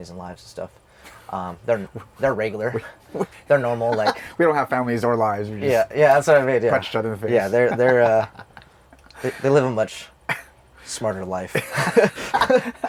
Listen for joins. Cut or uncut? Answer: uncut